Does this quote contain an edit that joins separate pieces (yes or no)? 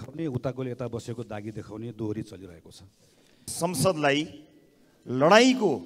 yes